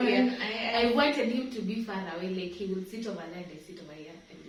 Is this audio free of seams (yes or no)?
yes